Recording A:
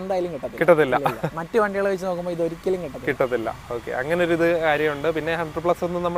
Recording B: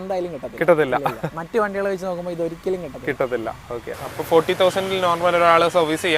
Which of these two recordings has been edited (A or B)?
B